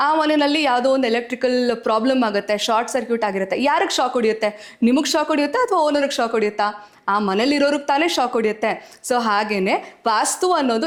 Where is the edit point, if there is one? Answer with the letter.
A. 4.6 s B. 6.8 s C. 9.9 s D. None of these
D